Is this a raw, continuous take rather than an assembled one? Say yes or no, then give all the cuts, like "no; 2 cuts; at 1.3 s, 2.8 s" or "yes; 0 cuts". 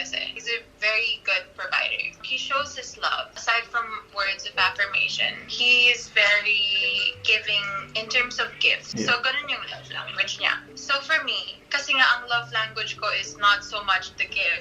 yes; 0 cuts